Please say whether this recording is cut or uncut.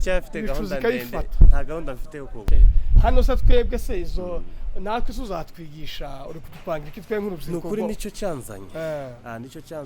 cut